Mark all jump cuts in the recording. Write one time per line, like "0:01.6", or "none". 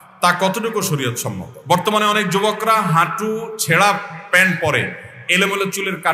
0:01.5